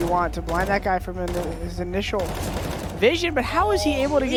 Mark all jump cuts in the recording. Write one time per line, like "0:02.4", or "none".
none